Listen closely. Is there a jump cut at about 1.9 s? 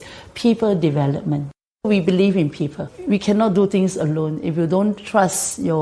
yes; 2 cuts; at 1.9 s, 2.9 s

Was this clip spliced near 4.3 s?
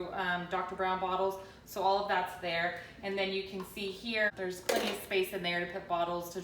yes; 1 cut; at 4.3 s

